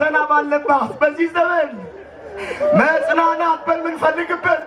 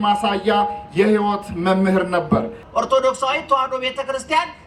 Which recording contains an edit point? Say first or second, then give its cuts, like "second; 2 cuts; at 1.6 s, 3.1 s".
second; 1 cut; at 2.6 s